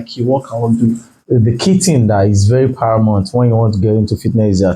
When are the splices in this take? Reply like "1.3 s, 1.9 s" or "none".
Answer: 1.1 s